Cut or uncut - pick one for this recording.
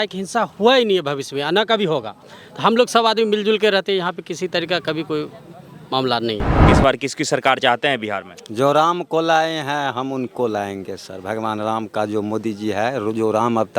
cut